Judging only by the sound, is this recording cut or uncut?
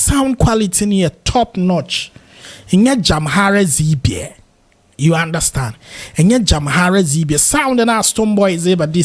uncut